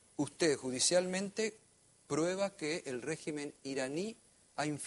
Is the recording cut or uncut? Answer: cut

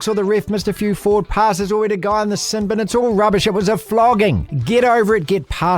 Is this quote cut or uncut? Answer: cut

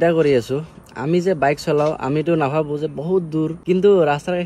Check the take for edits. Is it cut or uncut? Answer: cut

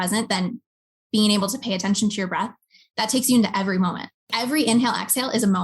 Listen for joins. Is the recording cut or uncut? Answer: cut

